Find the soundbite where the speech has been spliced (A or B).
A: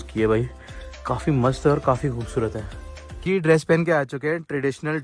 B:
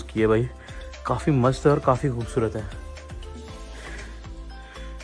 A